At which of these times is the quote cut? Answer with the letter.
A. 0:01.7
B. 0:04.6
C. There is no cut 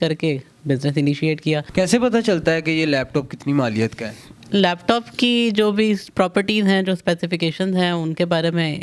A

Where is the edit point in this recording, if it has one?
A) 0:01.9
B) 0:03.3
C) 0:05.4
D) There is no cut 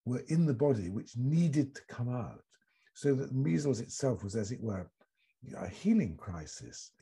D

